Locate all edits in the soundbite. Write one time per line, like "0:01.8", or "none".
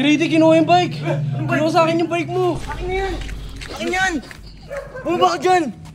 0:02.7

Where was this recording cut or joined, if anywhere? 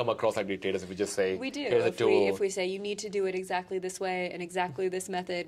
none

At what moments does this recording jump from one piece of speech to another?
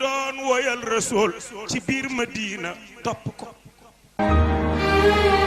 0:04.2

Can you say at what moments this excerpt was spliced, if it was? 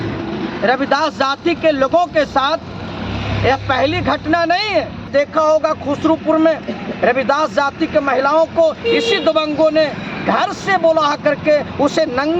0:05.1

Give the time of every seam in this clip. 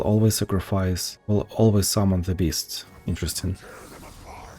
0:01.1

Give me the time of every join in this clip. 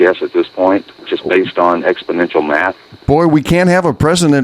0:00.9

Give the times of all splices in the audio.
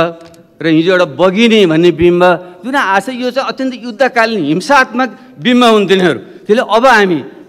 none

